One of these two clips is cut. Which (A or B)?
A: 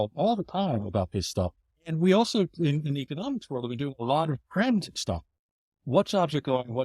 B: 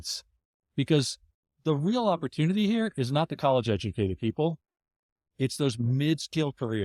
A